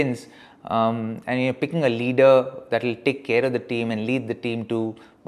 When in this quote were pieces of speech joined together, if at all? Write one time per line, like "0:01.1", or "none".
none